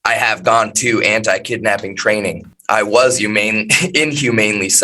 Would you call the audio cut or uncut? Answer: cut